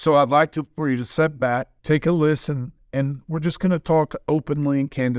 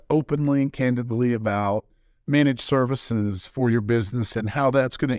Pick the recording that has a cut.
first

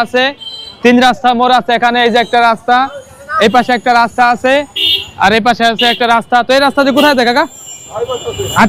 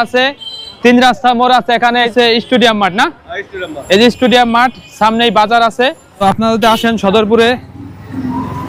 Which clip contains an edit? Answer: second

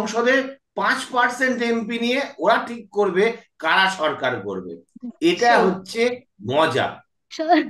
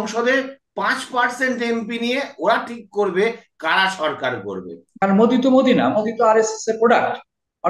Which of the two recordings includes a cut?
second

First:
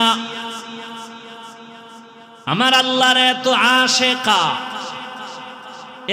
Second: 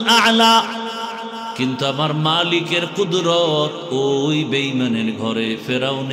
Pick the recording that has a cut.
second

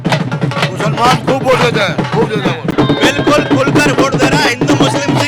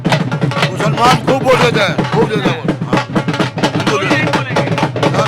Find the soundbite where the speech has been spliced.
first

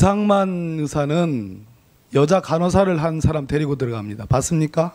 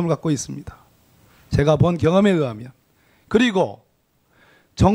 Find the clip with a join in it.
first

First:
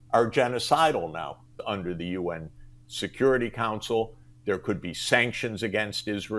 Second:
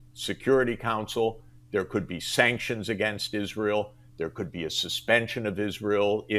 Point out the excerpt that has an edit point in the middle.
first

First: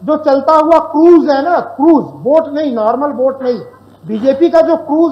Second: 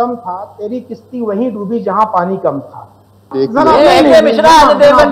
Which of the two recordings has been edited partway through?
second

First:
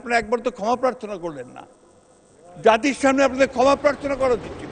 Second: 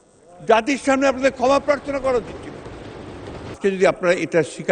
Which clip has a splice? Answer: second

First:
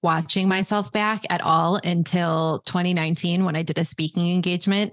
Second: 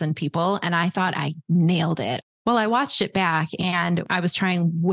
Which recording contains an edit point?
second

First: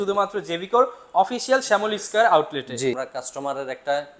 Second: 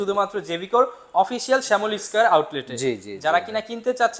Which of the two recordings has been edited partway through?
first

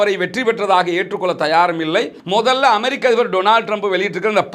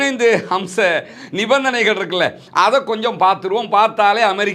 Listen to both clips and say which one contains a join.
first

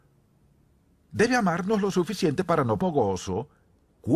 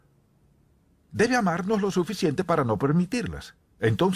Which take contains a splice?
second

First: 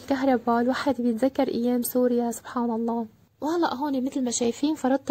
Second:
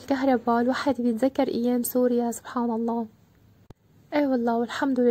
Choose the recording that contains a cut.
first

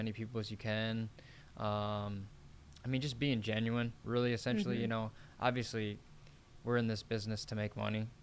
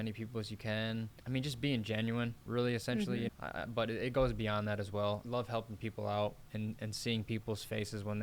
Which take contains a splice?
second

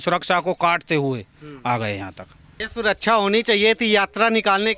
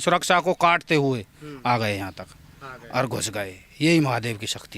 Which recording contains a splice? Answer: first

